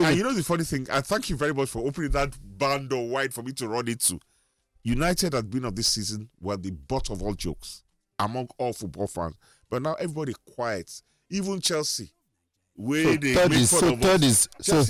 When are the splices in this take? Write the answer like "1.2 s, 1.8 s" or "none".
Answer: none